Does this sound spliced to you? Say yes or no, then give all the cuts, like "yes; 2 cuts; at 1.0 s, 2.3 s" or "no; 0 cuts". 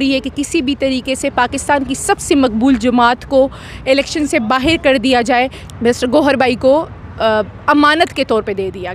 yes; 1 cut; at 5.6 s